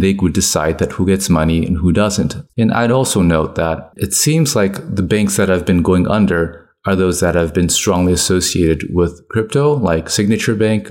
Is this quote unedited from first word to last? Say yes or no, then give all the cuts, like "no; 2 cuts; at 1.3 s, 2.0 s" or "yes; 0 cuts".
no; 1 cut; at 2.4 s